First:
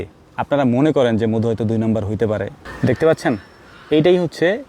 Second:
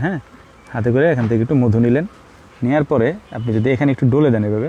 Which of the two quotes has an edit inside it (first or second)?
first